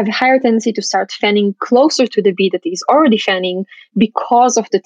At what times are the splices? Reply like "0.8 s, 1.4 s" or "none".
none